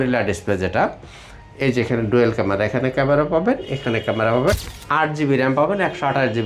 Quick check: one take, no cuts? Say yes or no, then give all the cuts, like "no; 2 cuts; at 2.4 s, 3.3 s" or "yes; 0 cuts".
no; 1 cut; at 4.6 s